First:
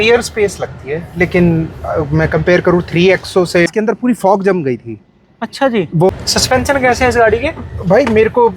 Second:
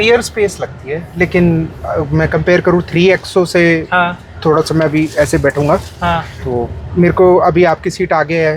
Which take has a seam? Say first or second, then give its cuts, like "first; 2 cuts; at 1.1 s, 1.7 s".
first; 2 cuts; at 3.7 s, 6.1 s